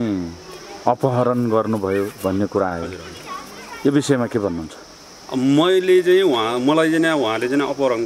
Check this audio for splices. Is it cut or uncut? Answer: uncut